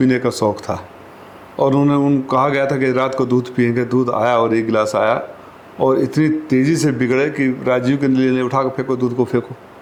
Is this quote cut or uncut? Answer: uncut